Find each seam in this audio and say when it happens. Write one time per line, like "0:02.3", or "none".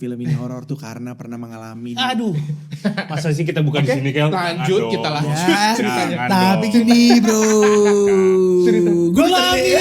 none